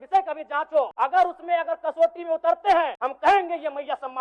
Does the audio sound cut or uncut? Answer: cut